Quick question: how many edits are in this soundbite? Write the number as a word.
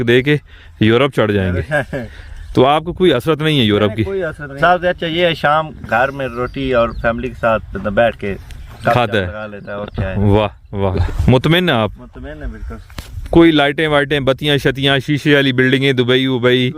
two